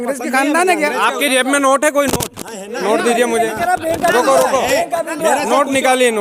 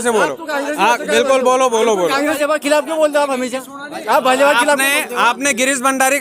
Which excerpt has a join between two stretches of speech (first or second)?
second